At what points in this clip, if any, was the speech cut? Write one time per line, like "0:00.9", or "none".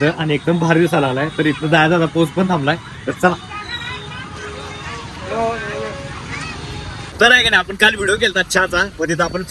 none